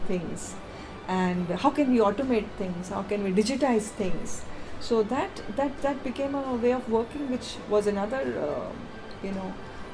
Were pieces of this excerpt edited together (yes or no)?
no